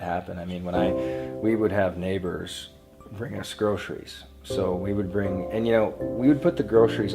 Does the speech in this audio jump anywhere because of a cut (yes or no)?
no